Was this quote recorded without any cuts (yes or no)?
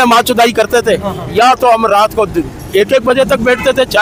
yes